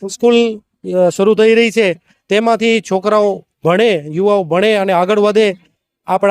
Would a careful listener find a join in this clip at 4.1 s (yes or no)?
no